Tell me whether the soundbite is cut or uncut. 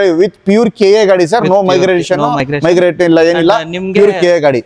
uncut